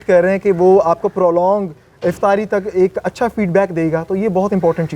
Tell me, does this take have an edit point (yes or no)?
no